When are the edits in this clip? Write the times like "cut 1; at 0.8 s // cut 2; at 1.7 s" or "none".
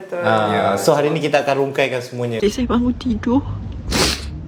cut 1; at 2.4 s